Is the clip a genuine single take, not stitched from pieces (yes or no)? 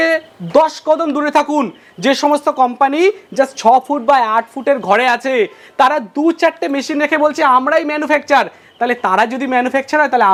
yes